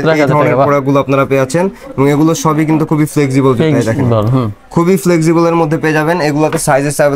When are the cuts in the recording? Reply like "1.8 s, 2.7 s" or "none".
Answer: none